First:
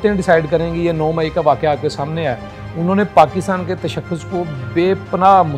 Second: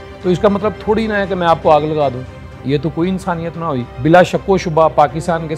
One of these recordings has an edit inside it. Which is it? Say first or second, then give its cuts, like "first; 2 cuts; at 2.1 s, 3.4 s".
second; 1 cut; at 3.9 s